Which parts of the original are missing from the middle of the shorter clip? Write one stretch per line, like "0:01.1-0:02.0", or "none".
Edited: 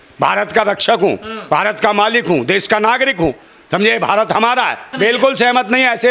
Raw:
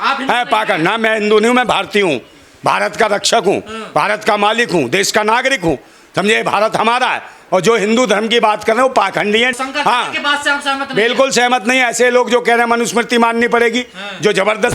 0:07.3-0:10.8